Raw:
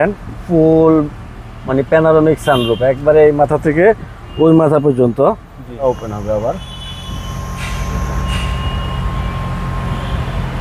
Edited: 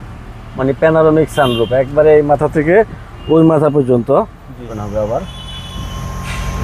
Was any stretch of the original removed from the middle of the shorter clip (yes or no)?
yes